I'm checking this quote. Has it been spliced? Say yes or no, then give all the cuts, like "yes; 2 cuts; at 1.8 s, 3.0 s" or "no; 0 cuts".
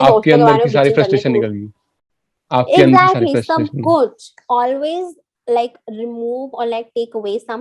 yes; 1 cut; at 4.3 s